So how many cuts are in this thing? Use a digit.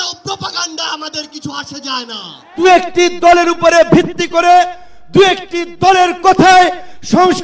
1